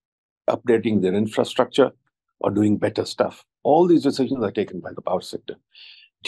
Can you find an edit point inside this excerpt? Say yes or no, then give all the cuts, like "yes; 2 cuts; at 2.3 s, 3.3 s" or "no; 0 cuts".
no; 0 cuts